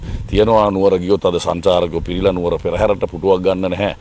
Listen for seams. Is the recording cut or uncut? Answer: uncut